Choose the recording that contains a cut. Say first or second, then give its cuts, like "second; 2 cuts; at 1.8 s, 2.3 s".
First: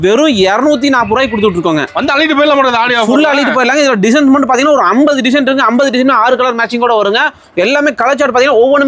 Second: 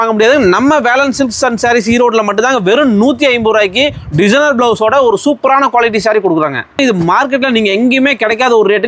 second; 1 cut; at 6.8 s